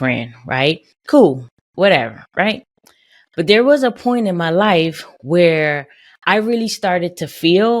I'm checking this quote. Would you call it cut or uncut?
cut